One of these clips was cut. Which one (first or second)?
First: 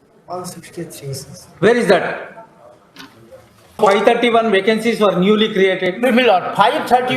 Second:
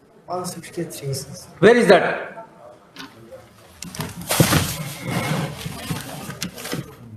first